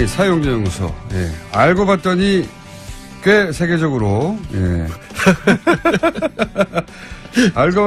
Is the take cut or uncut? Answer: uncut